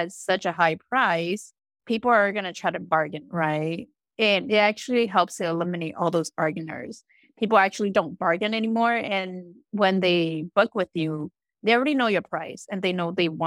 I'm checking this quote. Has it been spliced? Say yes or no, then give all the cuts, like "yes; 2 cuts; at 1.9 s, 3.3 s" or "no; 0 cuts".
no; 0 cuts